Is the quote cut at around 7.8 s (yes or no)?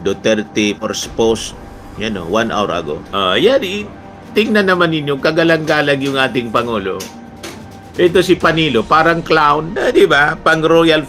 no